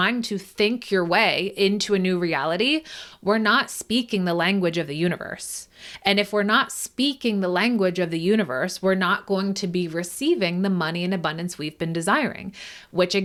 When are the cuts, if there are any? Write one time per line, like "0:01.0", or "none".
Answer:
none

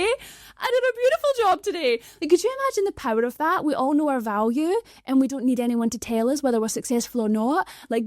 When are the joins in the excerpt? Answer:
none

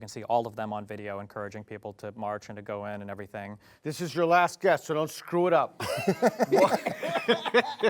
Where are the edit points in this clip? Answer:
0:03.6

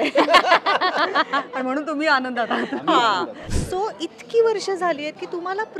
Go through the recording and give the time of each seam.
0:03.4

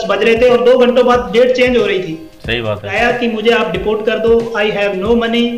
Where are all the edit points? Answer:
0:02.9

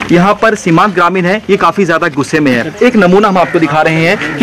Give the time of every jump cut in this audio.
0:02.7

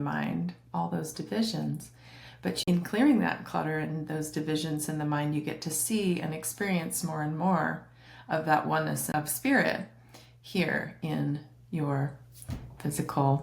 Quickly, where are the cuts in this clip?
0:02.6
0:09.0

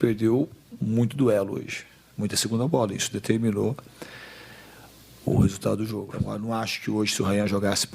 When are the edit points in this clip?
0:06.1

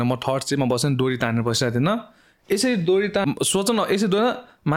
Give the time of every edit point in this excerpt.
0:03.2

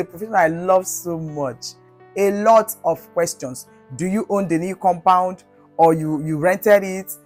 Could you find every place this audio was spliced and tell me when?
0:02.0

